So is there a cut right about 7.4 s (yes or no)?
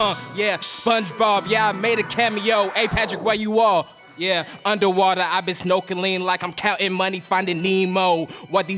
no